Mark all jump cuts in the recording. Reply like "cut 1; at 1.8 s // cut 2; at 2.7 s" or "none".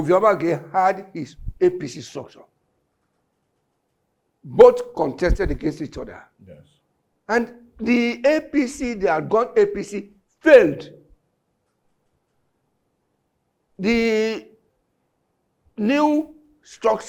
none